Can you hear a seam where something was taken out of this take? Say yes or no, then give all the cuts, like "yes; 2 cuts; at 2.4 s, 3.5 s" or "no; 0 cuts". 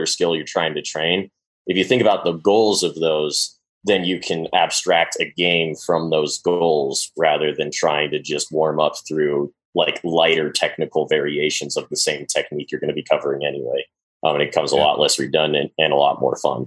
yes; 1 cut; at 14.0 s